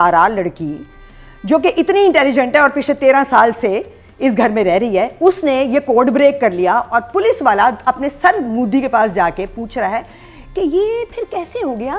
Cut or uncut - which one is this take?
uncut